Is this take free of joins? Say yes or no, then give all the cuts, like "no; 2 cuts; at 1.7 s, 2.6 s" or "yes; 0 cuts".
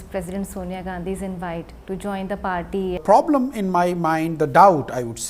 no; 1 cut; at 3.0 s